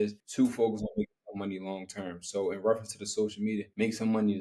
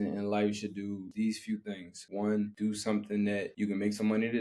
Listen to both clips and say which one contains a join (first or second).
second